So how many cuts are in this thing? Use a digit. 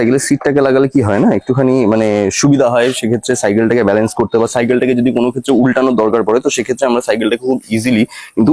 0